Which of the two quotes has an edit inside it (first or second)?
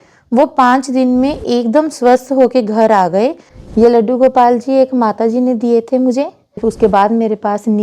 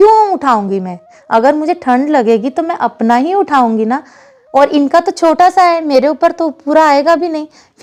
first